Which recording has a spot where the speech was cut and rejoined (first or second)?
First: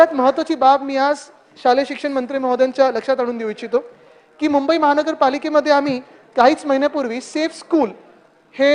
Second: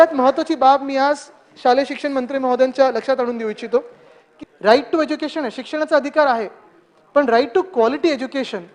second